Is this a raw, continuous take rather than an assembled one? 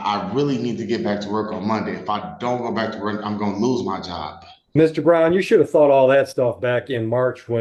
yes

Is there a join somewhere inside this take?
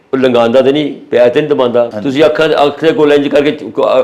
yes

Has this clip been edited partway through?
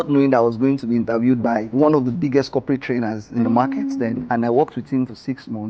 yes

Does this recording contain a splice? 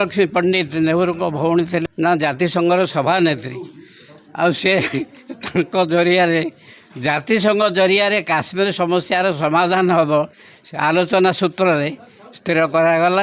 yes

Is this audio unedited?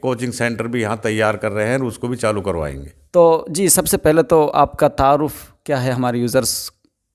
yes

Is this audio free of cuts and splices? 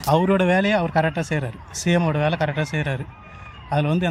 yes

